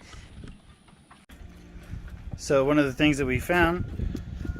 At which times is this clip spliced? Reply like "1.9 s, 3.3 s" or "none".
1.3 s